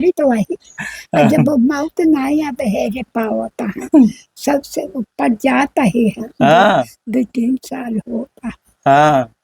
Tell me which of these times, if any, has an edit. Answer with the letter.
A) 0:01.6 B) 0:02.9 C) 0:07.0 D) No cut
D